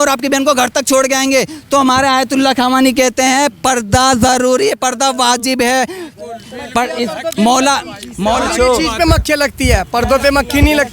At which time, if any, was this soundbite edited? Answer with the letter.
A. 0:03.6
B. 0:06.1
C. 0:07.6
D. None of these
D